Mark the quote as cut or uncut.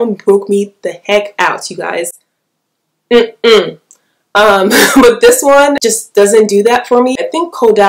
uncut